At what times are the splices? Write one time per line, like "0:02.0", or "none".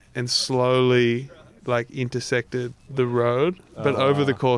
0:02.9